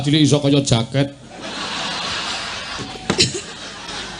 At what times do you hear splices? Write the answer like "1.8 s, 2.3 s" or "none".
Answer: 2.9 s